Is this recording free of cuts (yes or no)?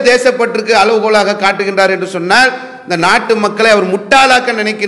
yes